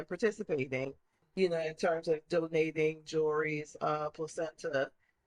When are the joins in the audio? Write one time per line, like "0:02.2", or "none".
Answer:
0:01.2

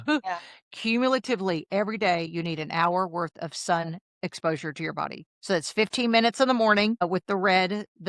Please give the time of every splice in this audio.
0:04.0
0:07.1

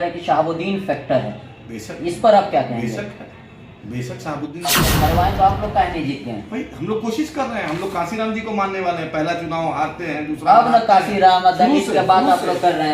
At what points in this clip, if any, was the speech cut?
0:04.7

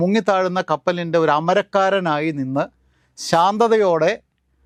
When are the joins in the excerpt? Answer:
none

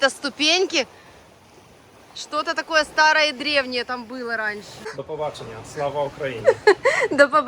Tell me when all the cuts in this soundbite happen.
0:04.9

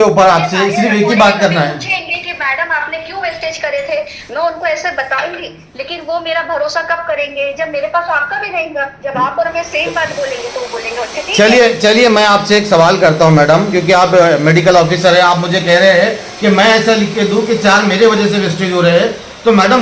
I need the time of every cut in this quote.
none

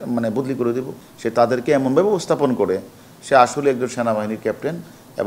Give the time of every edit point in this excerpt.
0:01.0

